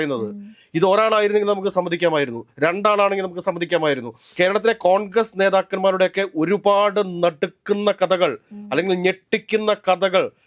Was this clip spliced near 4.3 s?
yes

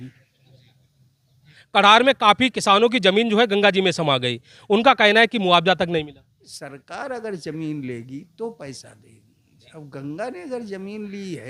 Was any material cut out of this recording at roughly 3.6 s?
no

